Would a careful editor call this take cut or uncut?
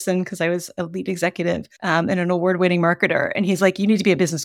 cut